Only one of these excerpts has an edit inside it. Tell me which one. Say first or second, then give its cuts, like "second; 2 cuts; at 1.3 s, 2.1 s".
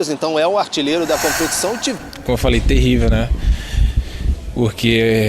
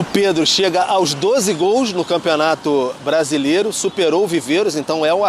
first; 1 cut; at 2.0 s